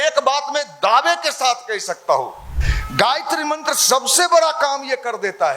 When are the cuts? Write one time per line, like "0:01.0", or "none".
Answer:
0:02.6